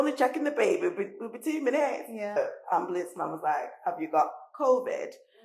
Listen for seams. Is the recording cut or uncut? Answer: cut